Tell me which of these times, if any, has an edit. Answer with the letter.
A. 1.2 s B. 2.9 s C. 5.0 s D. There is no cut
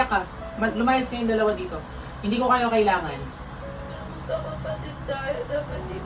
D